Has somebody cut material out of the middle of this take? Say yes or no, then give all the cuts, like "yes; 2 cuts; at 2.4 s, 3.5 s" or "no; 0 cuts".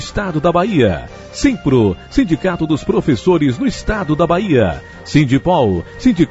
no; 0 cuts